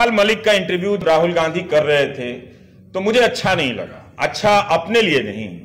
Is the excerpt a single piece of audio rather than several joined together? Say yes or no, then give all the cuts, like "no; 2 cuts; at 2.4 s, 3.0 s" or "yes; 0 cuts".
no; 1 cut; at 1.0 s